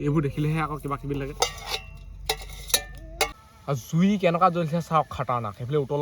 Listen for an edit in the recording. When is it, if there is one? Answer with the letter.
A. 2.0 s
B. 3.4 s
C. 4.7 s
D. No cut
B